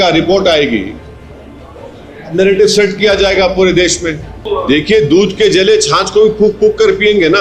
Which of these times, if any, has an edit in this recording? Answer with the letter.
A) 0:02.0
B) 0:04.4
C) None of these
B